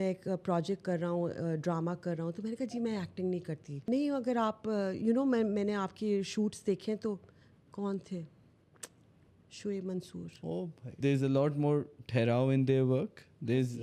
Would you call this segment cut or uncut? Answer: cut